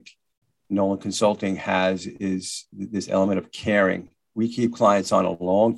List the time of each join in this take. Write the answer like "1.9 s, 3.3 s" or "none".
4.2 s